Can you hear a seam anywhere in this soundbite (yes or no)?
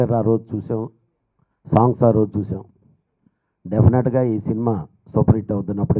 no